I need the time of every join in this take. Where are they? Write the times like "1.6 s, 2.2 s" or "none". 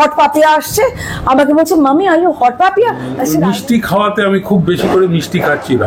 3.4 s